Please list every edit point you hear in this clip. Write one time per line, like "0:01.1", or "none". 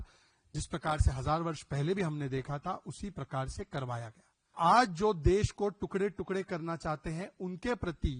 0:04.5